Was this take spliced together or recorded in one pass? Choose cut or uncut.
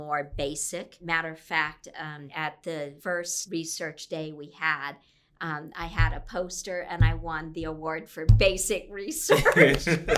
cut